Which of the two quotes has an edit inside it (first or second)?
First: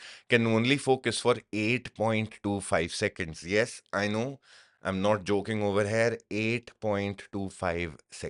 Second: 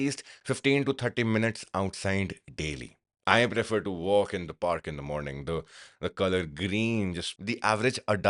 second